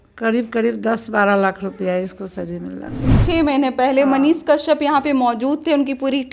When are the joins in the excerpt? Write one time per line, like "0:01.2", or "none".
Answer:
0:03.1